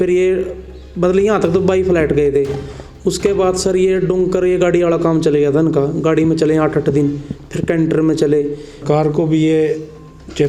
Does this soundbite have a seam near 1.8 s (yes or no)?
no